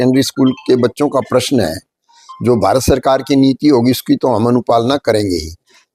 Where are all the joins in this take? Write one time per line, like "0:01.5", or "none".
none